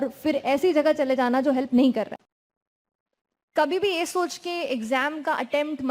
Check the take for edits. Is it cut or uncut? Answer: cut